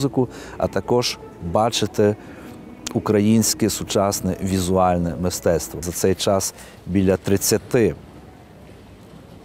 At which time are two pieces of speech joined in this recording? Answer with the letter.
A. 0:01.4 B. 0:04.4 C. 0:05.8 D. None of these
C